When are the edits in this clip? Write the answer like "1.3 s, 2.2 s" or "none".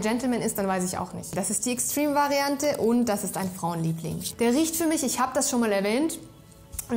1.3 s, 4.2 s